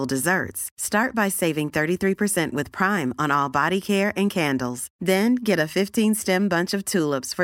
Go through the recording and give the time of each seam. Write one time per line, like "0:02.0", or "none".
none